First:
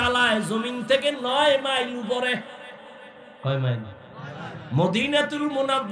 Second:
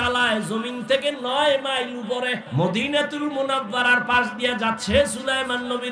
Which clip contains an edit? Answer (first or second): second